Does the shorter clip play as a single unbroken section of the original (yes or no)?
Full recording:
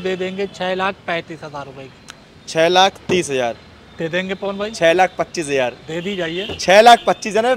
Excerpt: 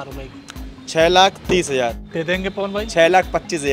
no